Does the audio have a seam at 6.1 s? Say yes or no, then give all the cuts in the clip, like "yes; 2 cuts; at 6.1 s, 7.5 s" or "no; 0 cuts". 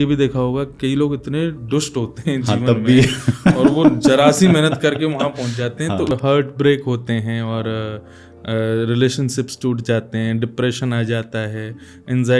yes; 1 cut; at 6.1 s